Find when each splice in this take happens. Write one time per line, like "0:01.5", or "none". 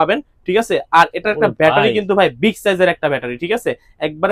none